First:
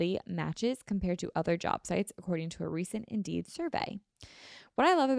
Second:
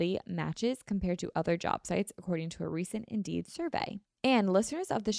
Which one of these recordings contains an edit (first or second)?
second